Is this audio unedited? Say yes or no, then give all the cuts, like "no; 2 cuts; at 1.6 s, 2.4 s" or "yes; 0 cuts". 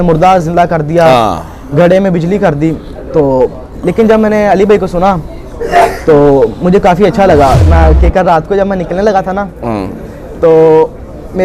no; 1 cut; at 7.6 s